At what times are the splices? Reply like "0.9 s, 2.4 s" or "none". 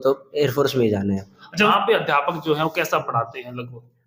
1.7 s